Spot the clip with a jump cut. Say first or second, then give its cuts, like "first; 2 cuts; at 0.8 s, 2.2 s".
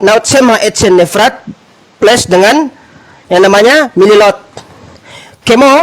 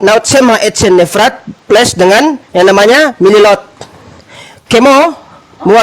second; 2 cuts; at 1.5 s, 2.4 s